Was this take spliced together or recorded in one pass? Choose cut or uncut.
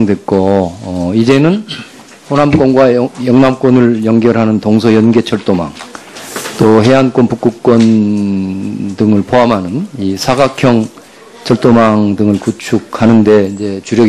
cut